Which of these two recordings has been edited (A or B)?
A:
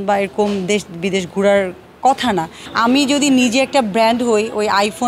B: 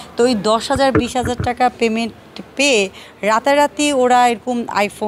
A